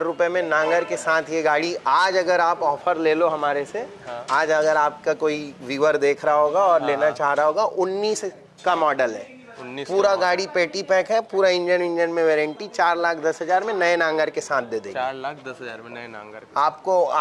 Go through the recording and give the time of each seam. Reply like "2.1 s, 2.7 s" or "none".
none